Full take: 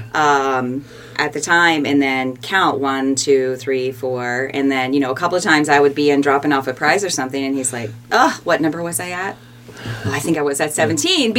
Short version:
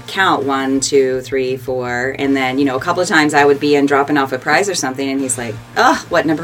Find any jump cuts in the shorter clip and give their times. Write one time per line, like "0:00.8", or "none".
none

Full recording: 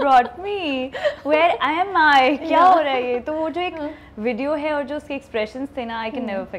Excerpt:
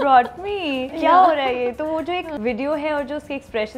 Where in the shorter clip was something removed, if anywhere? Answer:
0:00.9
0:02.3

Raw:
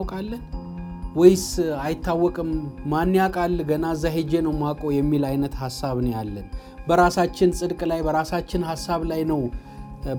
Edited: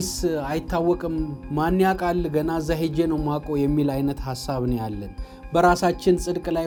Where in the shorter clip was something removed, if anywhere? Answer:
none

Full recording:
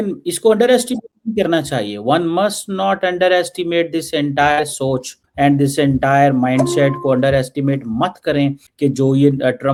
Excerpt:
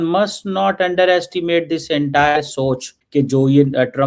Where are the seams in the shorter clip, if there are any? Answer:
0:03.0

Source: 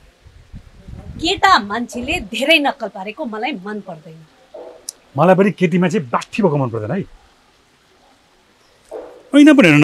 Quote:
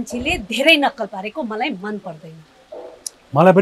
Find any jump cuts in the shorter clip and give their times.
none

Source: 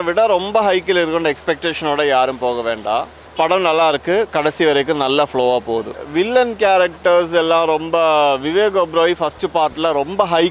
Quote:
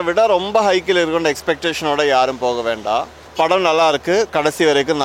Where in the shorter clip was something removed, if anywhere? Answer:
none

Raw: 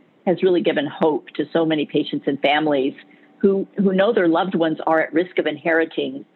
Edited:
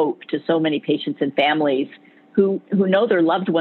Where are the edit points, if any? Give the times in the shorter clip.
none

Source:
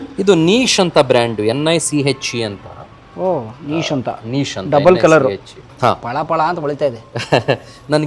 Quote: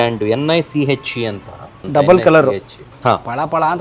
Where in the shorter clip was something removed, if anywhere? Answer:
0:01.8

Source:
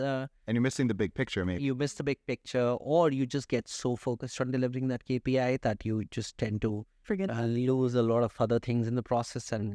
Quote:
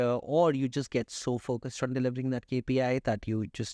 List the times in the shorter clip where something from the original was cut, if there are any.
none

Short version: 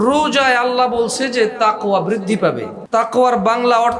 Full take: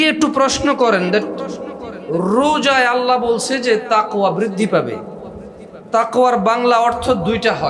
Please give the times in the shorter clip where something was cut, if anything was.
0:02.7

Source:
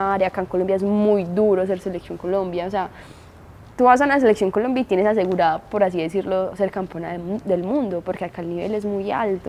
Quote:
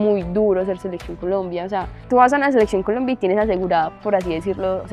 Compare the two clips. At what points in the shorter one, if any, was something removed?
0:01.9

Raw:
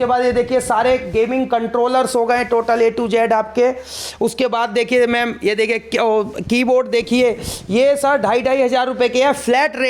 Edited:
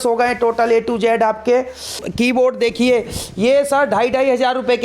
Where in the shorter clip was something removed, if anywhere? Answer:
0:02.0

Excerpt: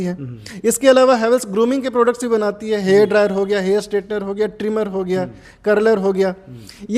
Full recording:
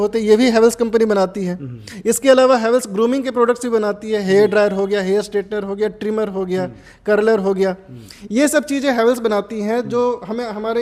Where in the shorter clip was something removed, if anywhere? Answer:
none

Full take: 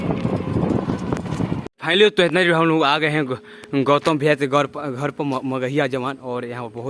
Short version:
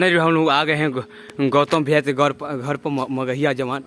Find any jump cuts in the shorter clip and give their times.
none

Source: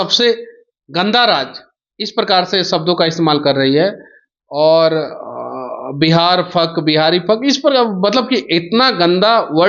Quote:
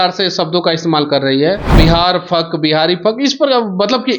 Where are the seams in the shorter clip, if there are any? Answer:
0:01.7

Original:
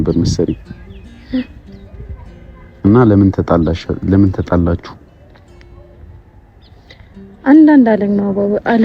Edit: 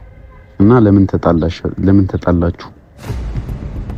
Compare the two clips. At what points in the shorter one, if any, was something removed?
none

